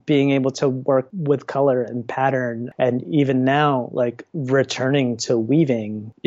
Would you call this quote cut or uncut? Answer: uncut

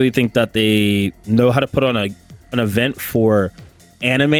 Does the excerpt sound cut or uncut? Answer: uncut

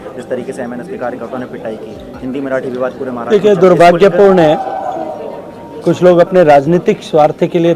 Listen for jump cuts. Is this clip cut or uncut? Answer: uncut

